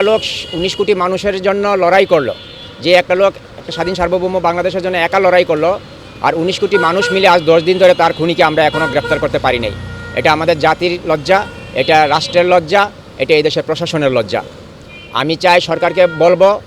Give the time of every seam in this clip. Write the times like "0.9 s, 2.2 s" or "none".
none